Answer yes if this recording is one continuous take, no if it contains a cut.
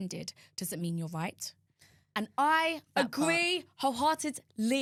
yes